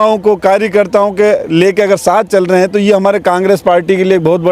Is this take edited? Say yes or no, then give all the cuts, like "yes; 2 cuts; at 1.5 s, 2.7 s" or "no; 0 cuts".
no; 0 cuts